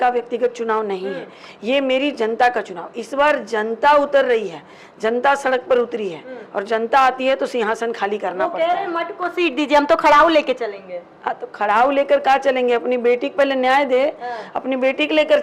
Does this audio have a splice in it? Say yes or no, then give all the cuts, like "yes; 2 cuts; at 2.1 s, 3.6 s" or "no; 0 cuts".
no; 0 cuts